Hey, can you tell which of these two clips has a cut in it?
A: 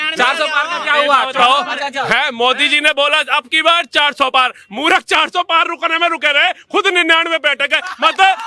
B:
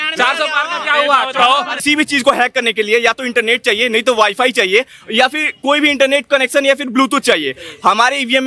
B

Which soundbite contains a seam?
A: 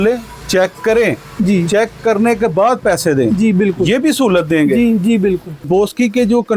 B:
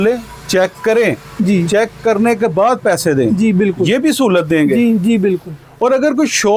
A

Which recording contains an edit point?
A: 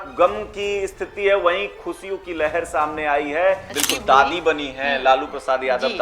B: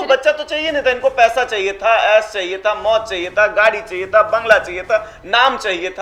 A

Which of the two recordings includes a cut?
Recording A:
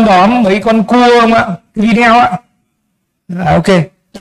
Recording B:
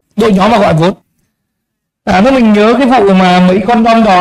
B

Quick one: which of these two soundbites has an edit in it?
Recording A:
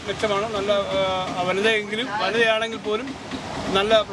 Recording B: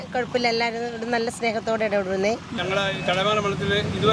B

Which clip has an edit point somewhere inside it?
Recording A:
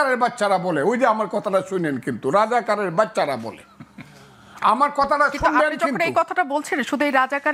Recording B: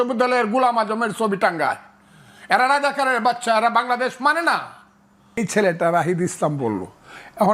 B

